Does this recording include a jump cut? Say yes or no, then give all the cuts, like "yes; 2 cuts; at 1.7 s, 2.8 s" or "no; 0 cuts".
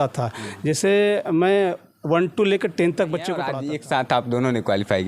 yes; 1 cut; at 3.5 s